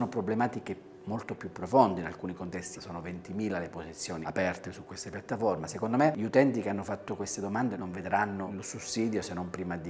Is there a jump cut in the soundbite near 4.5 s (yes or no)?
no